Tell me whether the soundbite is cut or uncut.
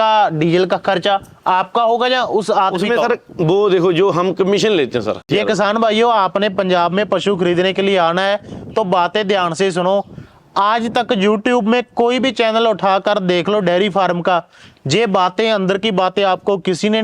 cut